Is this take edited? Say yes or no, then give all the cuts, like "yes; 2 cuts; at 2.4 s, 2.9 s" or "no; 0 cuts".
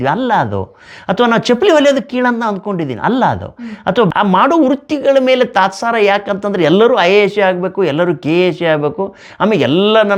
yes; 1 cut; at 4.1 s